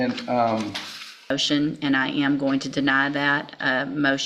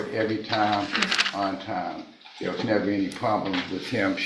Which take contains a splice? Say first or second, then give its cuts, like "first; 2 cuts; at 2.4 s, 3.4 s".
first; 1 cut; at 1.3 s